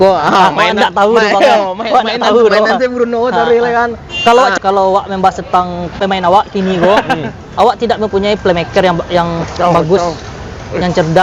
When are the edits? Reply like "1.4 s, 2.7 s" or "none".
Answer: 4.5 s